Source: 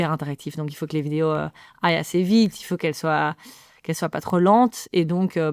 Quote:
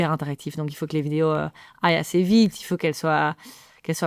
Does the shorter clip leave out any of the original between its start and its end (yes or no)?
no